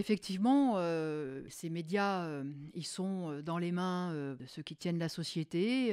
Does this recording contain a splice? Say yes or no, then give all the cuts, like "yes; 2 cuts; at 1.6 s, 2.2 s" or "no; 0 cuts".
yes; 2 cuts; at 1.5 s, 4.5 s